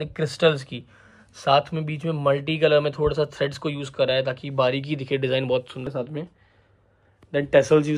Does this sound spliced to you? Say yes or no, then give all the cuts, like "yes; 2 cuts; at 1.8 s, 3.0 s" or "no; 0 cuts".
yes; 1 cut; at 5.9 s